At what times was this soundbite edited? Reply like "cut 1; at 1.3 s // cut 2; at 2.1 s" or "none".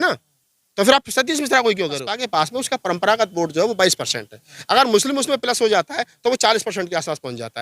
cut 1; at 2.1 s